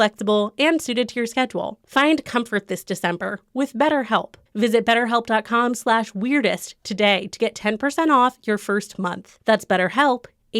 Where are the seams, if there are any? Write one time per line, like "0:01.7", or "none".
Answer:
0:01.8